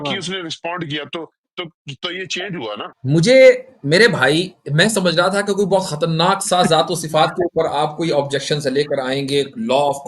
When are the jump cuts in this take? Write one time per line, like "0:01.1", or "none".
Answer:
0:02.9